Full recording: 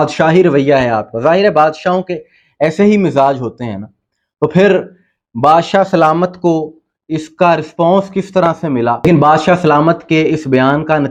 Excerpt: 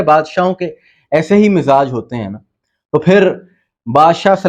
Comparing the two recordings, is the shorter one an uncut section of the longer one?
yes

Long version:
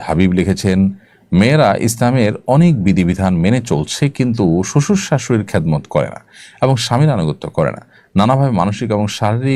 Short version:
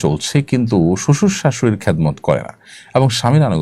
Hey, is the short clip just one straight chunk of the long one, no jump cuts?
yes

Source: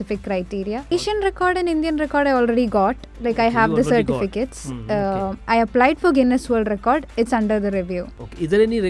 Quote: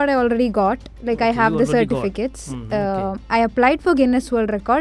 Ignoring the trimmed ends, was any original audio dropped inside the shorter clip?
no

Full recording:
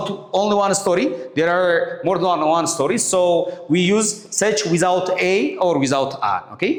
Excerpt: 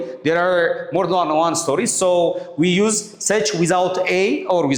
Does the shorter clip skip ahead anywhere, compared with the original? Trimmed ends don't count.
no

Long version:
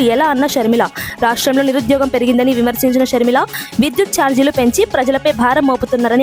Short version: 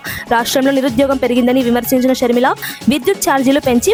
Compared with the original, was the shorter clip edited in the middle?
no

